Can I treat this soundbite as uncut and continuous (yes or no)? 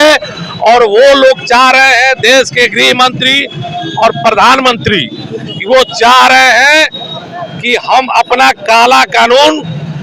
yes